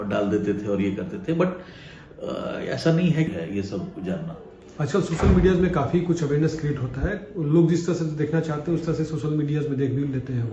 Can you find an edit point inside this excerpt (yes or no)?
yes